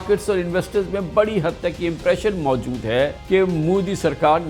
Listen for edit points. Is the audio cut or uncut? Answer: cut